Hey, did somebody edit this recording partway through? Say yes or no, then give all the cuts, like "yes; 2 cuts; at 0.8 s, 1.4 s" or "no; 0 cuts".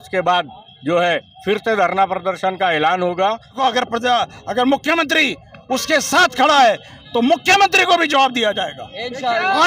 yes; 2 cuts; at 3.6 s, 8.8 s